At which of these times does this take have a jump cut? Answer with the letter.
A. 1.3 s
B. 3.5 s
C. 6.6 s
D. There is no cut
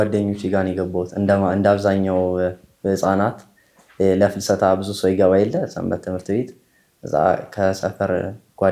D